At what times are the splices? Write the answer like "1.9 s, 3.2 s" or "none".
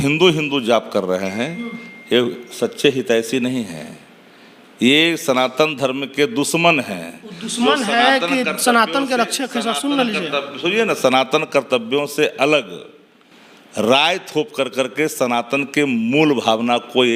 none